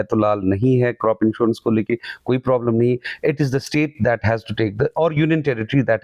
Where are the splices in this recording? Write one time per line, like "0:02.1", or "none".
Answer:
none